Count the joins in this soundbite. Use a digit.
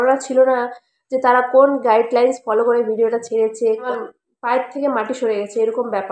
1